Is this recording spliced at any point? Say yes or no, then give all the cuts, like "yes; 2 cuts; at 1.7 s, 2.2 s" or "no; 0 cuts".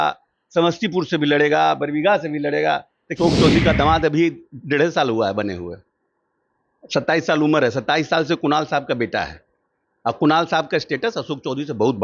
yes; 1 cut; at 3.2 s